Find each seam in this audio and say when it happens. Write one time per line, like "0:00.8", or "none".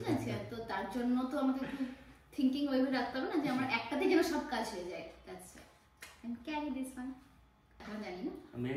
0:07.8